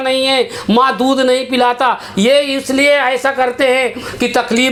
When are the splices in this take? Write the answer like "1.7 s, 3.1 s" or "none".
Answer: none